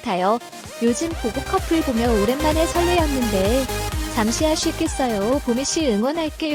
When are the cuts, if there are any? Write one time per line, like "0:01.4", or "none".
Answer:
none